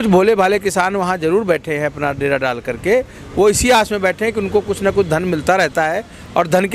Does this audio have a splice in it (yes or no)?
no